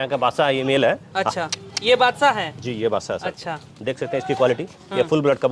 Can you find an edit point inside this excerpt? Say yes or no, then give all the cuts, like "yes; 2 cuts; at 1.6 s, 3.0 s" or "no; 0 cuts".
no; 0 cuts